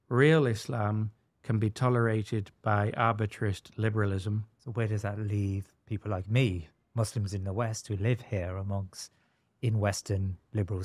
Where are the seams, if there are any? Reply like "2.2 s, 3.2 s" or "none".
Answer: 4.6 s